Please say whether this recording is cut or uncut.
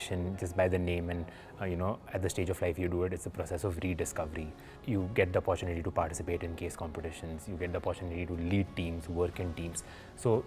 cut